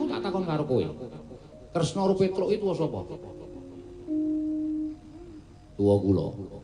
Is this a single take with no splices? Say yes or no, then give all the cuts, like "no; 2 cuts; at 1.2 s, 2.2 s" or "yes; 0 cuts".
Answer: yes; 0 cuts